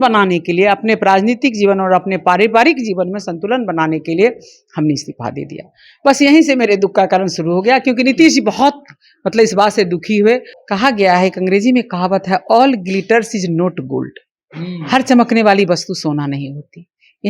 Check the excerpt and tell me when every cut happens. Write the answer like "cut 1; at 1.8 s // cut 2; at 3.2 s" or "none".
cut 1; at 10.6 s